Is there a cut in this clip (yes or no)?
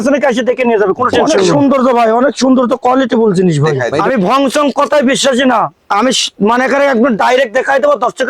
yes